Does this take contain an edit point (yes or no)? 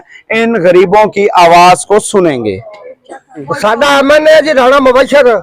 yes